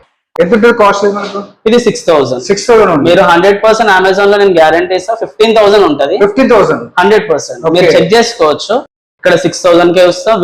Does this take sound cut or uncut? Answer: uncut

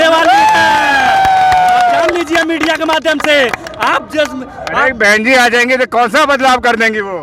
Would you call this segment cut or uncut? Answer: uncut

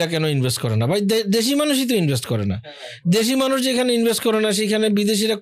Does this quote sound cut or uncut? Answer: uncut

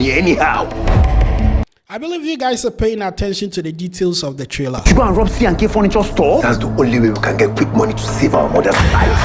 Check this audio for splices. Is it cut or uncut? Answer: uncut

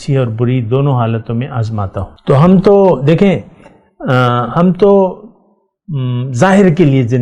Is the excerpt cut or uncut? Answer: cut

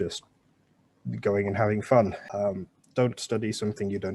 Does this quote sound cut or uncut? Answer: cut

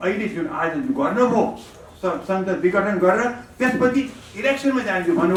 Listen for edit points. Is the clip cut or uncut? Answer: uncut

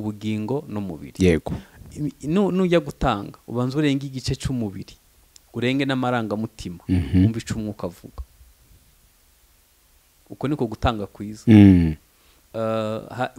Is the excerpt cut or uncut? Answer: uncut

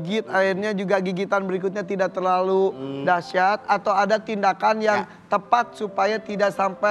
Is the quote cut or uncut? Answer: uncut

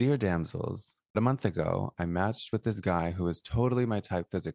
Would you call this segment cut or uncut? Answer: cut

